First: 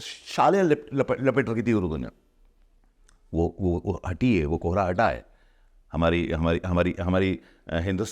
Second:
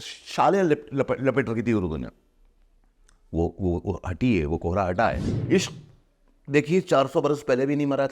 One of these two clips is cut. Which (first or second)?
second